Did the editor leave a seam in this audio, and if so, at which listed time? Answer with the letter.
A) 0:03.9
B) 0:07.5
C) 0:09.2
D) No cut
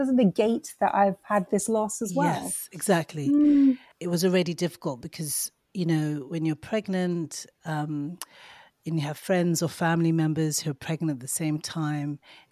A